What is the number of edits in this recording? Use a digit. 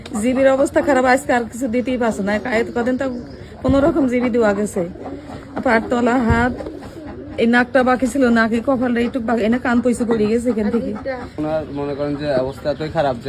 1